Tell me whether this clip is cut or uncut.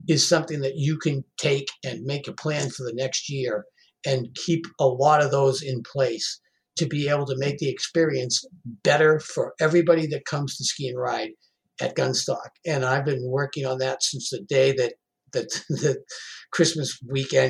uncut